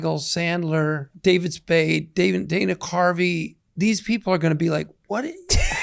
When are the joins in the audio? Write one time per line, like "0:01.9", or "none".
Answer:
0:01.1